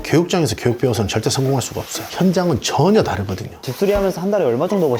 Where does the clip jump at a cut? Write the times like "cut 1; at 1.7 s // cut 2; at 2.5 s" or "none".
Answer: cut 1; at 3.5 s